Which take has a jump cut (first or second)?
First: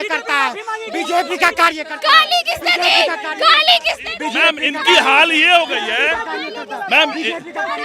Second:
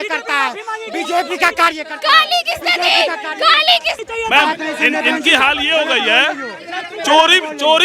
second